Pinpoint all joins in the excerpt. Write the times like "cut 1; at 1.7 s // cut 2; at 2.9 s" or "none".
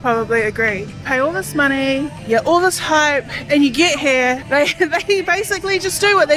none